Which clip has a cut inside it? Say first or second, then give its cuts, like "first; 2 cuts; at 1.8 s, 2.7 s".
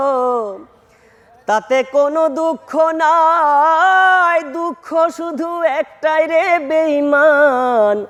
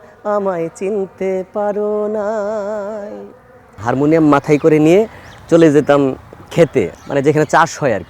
second; 2 cuts; at 3.8 s, 7.0 s